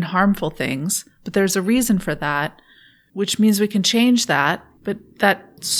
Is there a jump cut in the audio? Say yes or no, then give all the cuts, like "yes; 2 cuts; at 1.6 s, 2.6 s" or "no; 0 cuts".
yes; 1 cut; at 4.7 s